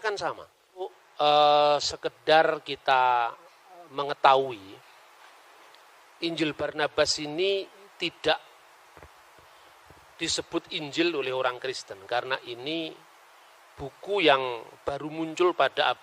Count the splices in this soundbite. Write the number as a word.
one